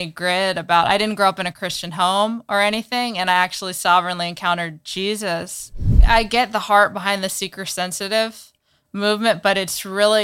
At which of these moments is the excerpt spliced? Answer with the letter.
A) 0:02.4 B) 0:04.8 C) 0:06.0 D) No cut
C